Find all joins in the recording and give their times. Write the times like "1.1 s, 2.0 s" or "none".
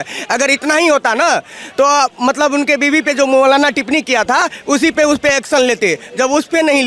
none